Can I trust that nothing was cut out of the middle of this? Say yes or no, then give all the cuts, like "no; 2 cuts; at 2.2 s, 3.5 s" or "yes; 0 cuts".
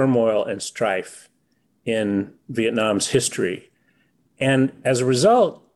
yes; 0 cuts